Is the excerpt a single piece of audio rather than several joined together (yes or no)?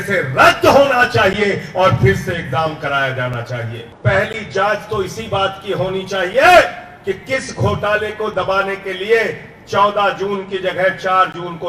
no